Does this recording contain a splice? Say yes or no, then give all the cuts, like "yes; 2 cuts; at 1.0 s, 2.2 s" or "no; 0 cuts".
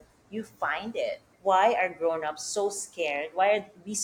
yes; 1 cut; at 1.3 s